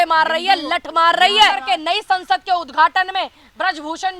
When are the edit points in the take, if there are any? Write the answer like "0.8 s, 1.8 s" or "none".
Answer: 1.6 s